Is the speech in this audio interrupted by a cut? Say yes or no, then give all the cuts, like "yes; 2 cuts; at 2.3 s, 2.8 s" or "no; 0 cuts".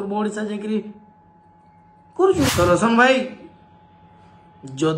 yes; 1 cut; at 2.5 s